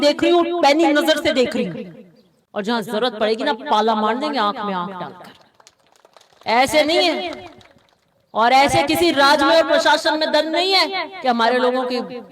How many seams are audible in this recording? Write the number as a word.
zero